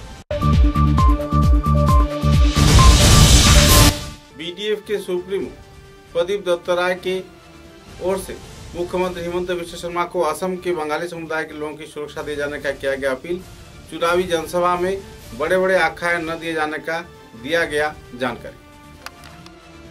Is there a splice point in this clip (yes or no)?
yes